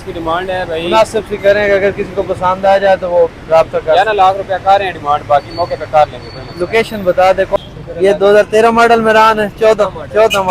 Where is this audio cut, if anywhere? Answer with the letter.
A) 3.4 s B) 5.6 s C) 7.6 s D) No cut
C